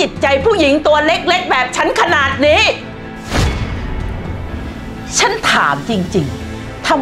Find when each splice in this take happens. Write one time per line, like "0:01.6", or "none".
none